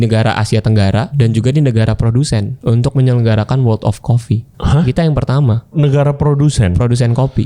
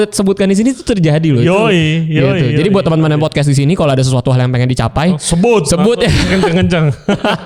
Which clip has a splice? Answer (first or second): first